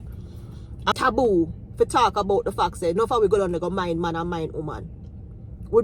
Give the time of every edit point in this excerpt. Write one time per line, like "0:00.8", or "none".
0:00.9